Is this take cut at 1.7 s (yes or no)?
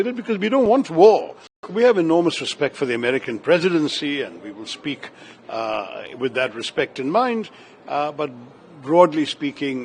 yes